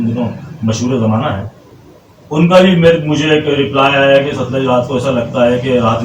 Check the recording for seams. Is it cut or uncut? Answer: uncut